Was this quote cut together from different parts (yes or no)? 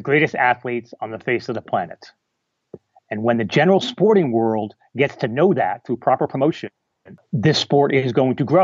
yes